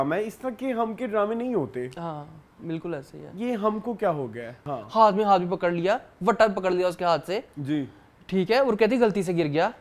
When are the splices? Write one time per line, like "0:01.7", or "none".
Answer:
0:04.6
0:07.5